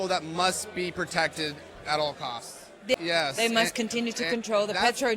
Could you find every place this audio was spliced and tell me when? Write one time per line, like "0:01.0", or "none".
0:02.9